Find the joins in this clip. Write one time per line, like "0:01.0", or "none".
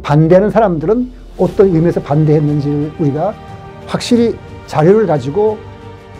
none